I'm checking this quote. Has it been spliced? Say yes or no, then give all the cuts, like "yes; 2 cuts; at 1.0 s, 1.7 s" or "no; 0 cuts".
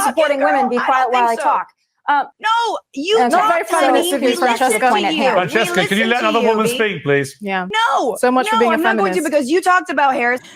yes; 2 cuts; at 2.4 s, 7.7 s